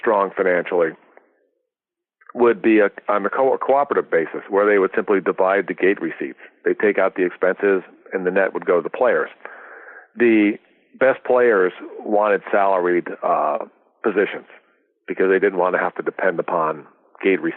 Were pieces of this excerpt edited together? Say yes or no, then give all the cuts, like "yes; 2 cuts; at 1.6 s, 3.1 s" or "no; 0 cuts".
no; 0 cuts